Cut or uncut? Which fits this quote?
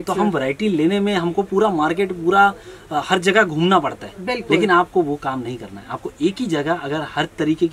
uncut